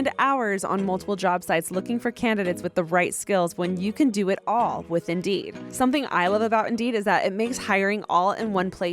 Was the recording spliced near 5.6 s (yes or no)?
yes